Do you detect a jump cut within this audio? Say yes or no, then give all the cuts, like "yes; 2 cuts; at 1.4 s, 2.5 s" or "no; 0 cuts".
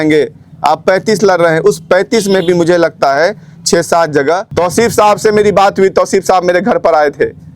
yes; 1 cut; at 4.5 s